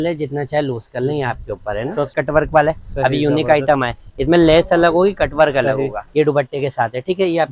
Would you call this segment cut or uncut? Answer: cut